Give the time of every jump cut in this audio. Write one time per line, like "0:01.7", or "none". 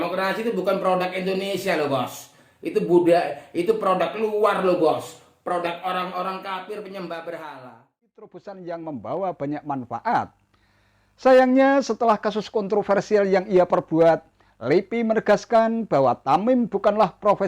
0:08.4